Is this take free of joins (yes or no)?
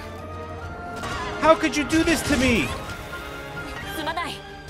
no